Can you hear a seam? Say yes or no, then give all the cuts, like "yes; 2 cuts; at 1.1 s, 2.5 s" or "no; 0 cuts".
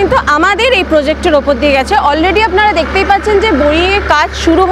no; 0 cuts